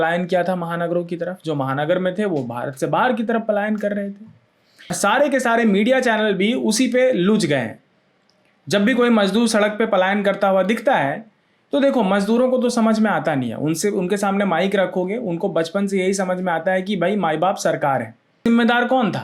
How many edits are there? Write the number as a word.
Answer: two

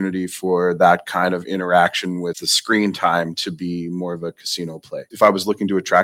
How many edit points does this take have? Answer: two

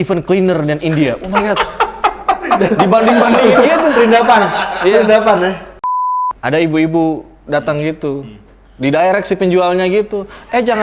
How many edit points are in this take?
one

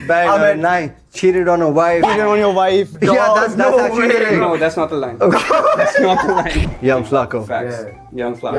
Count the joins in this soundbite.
two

